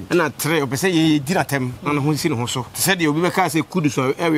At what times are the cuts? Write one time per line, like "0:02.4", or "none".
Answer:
0:02.7

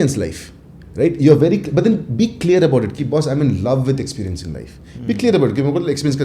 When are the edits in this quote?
none

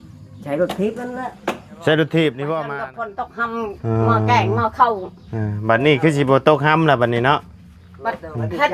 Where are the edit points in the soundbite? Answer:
0:02.6

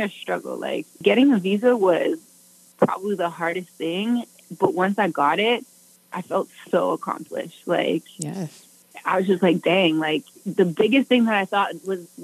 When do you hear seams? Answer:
0:01.0

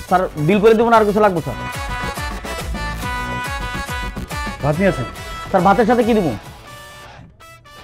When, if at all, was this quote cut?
none

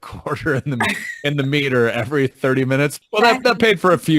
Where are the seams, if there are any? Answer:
0:03.0

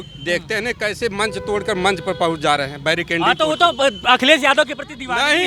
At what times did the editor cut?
none

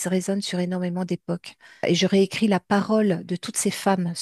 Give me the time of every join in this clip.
0:01.8

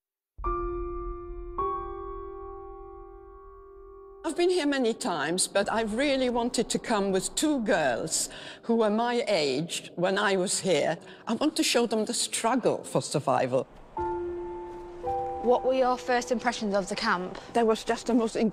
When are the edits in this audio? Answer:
none

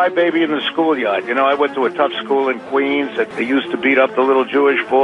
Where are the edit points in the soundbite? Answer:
0:03.4

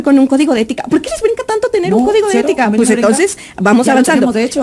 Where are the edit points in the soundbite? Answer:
none

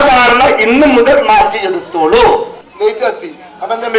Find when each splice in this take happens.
0:02.6

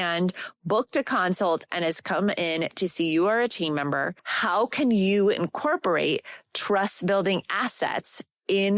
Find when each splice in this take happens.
0:04.2

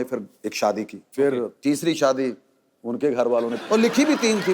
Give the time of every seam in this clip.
0:01.0
0:03.6

